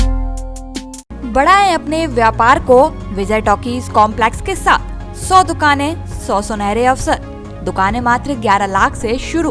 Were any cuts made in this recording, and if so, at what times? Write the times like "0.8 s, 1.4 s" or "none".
none